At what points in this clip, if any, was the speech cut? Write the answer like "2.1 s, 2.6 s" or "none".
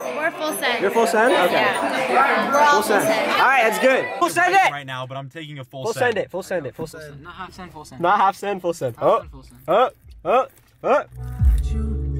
4.1 s, 6.9 s